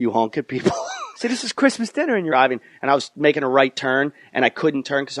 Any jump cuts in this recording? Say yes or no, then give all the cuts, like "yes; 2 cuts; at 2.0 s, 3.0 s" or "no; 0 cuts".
no; 0 cuts